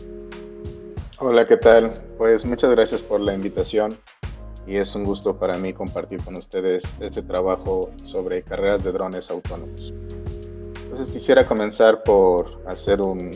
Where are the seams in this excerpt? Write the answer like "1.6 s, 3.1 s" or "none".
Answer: 9.6 s, 10.9 s